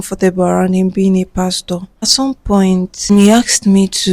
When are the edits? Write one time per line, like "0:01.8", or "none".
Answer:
0:02.1
0:03.1

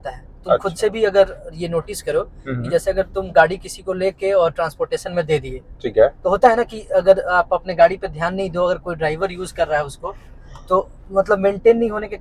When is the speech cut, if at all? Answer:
none

